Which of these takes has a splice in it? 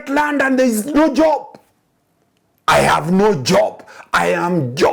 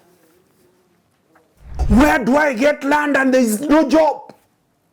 second; 1 cut; at 1.8 s

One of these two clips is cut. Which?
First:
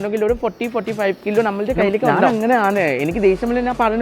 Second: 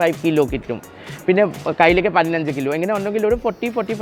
first; 1 cut; at 2.3 s

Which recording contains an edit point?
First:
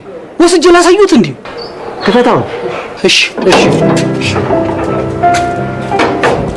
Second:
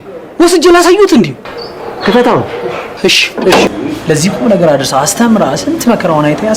second; 1 cut; at 3.7 s

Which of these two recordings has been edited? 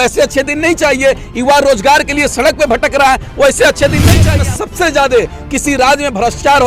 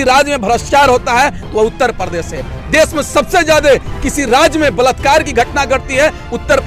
first; 1 cut; at 4.3 s

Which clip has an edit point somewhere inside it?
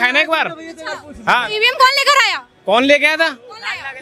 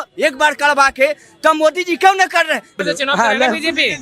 second; 1 cut; at 2.8 s

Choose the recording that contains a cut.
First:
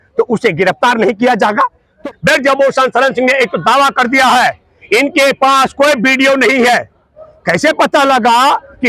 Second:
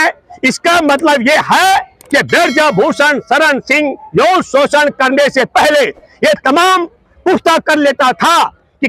first; 1 cut; at 2.0 s

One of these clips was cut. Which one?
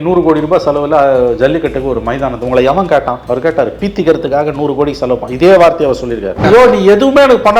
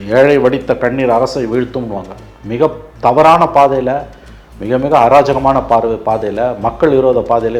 first; 2 cuts; at 3.2 s, 6.4 s

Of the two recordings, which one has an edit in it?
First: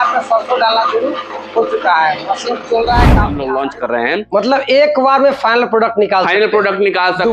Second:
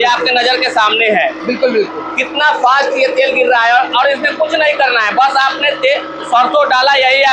first; 1 cut; at 3.3 s

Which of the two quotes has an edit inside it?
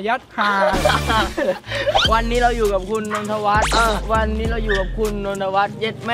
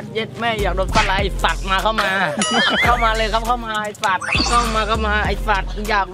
first; 1 cut; at 2.0 s

